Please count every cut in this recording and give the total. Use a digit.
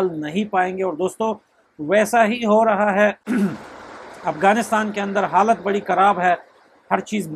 0